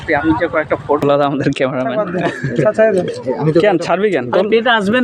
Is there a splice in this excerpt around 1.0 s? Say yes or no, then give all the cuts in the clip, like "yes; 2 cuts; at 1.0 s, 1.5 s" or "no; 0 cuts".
yes; 1 cut; at 1.0 s